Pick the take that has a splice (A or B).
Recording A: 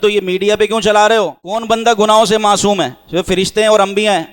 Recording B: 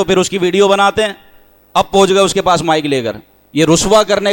A